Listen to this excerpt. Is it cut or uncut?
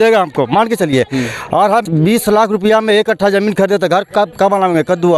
cut